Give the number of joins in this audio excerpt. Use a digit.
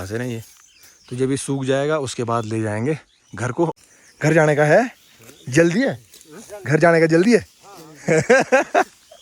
1